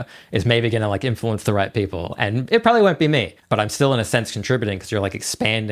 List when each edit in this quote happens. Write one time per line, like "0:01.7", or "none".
0:03.4